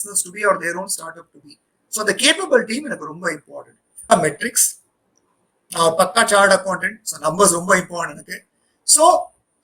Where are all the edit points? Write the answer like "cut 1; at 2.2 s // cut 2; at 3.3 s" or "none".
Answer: cut 1; at 4.1 s

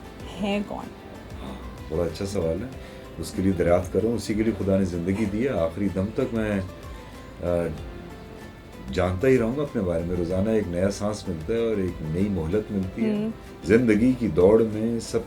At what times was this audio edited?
cut 1; at 13.5 s

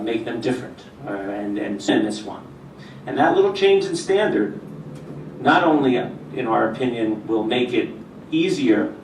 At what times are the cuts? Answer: none

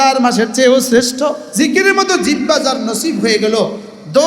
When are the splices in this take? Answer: cut 1; at 1.4 s

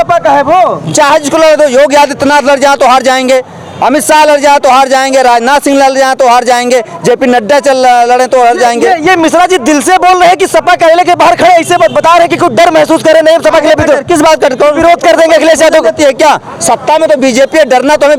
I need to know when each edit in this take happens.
none

